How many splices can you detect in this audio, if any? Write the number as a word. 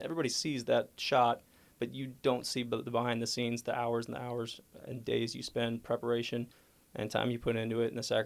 zero